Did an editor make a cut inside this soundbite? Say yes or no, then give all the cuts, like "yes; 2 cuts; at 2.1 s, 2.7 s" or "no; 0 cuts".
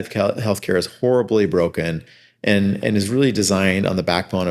no; 0 cuts